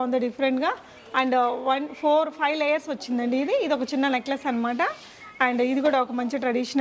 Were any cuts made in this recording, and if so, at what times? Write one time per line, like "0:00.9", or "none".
none

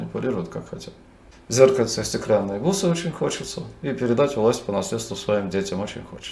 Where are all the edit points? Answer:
0:01.3

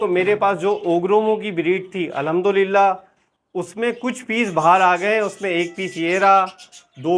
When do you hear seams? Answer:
none

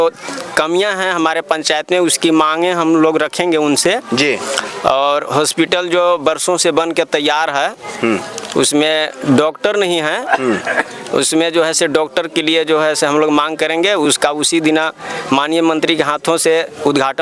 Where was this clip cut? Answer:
none

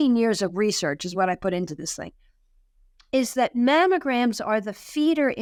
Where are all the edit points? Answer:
none

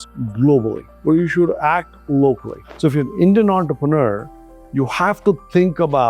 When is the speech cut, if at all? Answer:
0:02.5

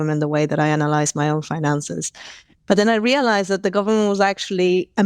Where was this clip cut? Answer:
none

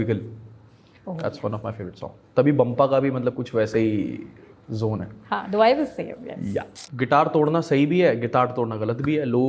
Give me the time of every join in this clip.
0:06.8

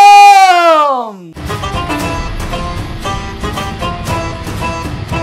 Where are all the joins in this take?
0:01.3

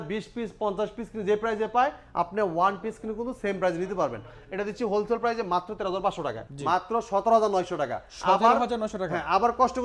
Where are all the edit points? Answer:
0:06.4

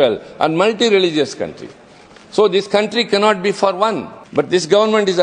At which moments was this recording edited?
0:04.1

